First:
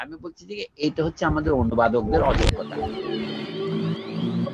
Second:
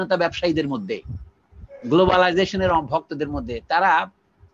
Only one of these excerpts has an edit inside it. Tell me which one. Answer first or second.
first